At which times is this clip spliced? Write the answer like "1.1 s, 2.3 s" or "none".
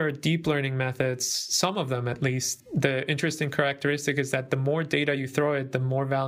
2.5 s